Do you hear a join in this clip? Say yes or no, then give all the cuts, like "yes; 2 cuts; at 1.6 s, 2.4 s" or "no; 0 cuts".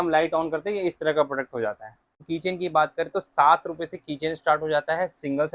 yes; 1 cut; at 2.2 s